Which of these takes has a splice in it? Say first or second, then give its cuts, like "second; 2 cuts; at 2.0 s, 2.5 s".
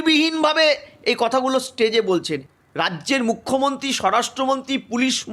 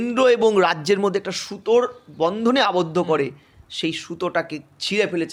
first; 1 cut; at 2.4 s